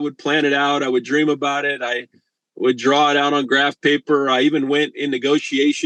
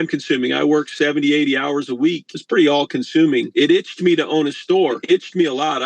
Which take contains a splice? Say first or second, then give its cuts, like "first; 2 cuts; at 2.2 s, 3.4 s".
second; 3 cuts; at 2.3 s, 3.5 s, 5.0 s